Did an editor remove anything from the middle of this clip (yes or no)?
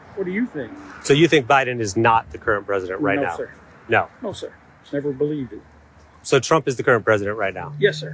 yes